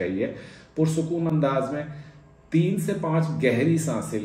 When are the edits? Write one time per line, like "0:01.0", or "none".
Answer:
none